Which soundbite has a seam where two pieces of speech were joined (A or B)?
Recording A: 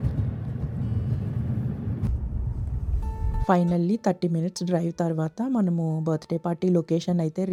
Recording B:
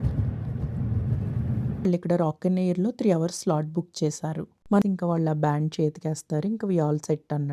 B